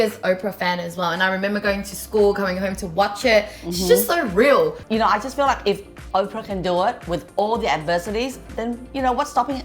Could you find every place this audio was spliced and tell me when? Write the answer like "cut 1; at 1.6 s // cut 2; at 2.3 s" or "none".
cut 1; at 4.8 s // cut 2; at 8.5 s